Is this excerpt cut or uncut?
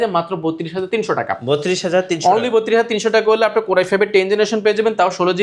uncut